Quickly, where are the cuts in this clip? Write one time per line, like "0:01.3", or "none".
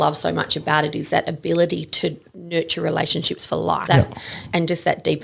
0:03.8